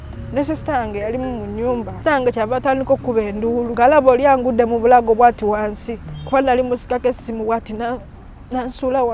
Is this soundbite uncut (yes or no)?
no